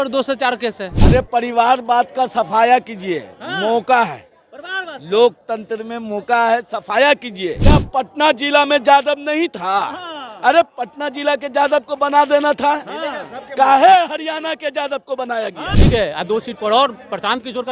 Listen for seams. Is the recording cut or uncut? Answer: cut